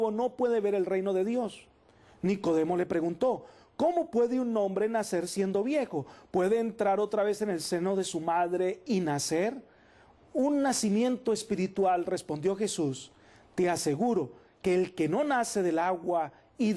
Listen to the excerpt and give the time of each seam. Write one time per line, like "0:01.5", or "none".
0:10.7